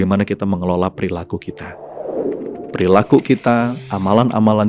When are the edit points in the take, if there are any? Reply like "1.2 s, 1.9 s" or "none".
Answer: none